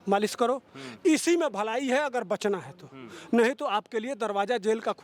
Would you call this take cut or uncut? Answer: uncut